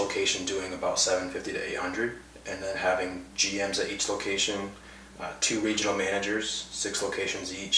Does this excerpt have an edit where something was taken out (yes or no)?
no